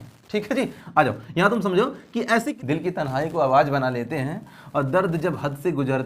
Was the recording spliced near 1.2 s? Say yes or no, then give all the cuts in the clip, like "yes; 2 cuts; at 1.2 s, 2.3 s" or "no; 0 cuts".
no; 1 cut; at 2.5 s